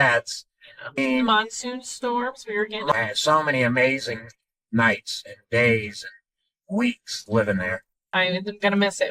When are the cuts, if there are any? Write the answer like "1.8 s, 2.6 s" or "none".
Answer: 0.9 s, 2.9 s, 8.0 s